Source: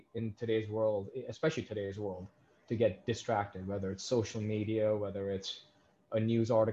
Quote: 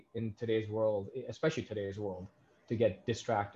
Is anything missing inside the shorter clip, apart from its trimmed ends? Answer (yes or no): no